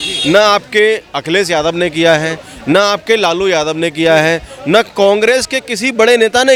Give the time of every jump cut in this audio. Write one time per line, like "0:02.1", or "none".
none